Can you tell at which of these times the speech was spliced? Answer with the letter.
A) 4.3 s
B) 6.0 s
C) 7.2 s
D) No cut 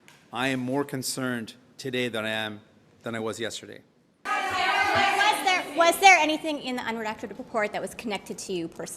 A